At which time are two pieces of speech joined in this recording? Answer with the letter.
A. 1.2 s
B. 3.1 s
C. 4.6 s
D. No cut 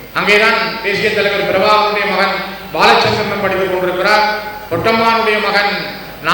D